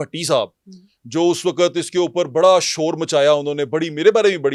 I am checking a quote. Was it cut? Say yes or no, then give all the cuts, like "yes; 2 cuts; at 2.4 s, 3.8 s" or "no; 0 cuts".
no; 0 cuts